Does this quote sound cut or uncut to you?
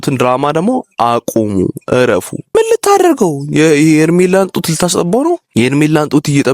cut